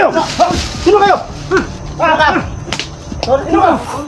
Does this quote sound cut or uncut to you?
uncut